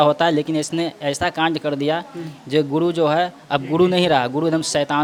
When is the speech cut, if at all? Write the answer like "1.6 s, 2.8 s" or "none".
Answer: none